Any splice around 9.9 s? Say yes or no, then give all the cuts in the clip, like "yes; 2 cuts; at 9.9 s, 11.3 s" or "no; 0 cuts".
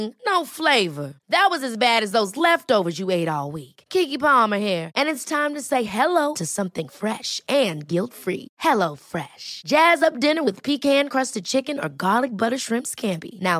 no; 0 cuts